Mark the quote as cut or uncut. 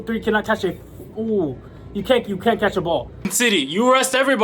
cut